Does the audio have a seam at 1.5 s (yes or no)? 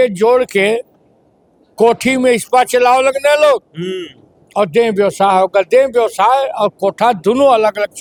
no